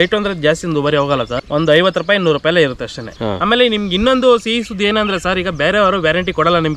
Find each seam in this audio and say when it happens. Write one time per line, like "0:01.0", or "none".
0:01.4
0:03.1